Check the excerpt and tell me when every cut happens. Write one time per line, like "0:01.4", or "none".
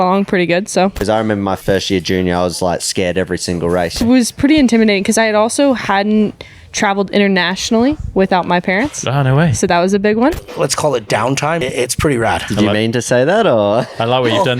0:01.5
0:04.0
0:10.5
0:11.6